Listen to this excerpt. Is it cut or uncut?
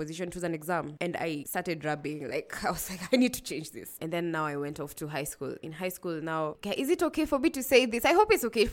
cut